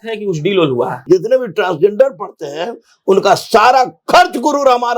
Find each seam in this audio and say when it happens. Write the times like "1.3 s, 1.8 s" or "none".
1.0 s